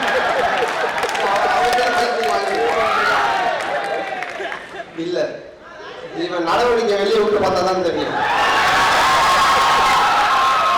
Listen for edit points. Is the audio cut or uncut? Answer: uncut